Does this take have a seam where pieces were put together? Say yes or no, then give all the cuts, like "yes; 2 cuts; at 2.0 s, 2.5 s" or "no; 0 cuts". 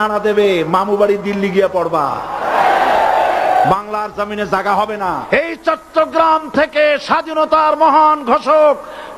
yes; 1 cut; at 5.3 s